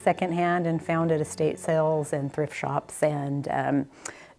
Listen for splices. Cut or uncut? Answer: uncut